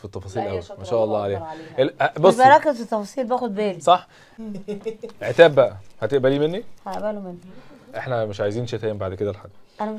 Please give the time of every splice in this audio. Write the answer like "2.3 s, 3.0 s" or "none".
4.4 s